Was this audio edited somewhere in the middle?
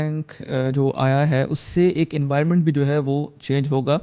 no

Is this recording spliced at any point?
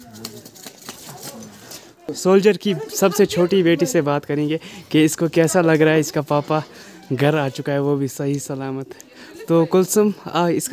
yes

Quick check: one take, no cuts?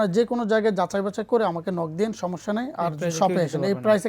yes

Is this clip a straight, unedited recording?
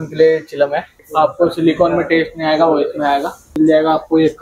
no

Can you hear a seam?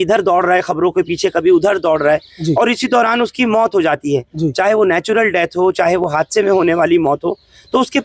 no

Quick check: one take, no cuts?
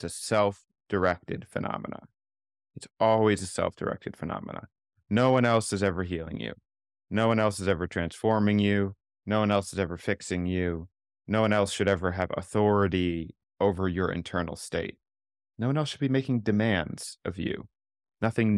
yes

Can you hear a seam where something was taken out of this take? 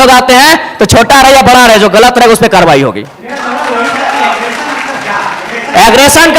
no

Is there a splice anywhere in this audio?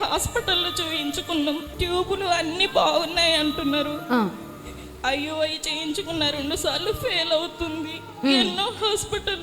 yes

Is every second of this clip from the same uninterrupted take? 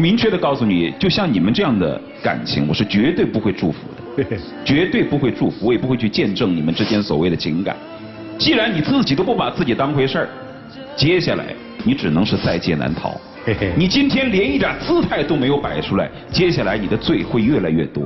yes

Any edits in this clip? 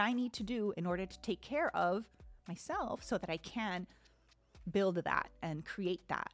no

